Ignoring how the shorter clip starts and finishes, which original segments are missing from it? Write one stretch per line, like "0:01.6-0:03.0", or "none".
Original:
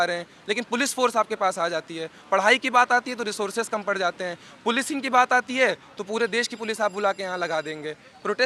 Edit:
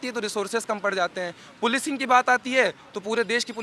none